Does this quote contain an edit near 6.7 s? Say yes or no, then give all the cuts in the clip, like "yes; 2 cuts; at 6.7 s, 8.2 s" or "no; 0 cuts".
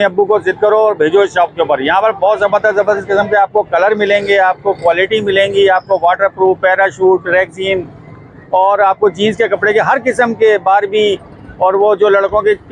no; 0 cuts